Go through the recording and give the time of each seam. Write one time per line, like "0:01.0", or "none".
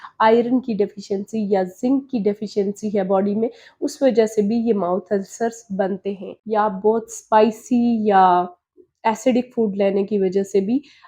0:06.3